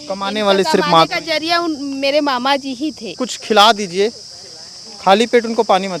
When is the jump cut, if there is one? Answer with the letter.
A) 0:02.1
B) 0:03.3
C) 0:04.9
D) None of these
B